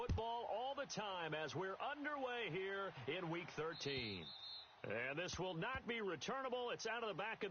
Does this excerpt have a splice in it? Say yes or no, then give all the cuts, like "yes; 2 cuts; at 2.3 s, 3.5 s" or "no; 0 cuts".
yes; 1 cut; at 4.3 s